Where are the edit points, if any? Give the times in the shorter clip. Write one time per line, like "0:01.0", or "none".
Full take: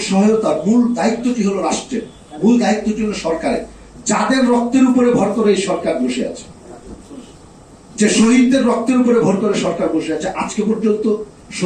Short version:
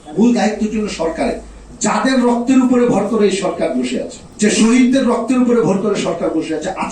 0:04.2